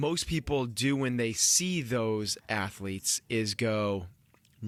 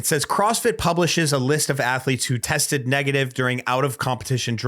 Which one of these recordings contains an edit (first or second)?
second